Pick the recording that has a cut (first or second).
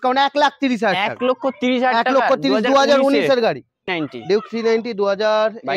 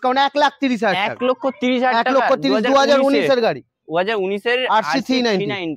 first